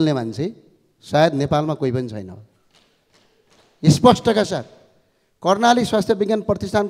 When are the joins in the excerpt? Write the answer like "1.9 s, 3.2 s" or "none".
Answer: none